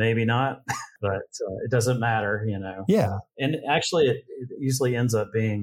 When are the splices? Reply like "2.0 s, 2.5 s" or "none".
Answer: 0.9 s